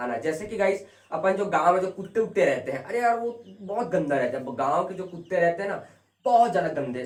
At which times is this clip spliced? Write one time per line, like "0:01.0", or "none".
none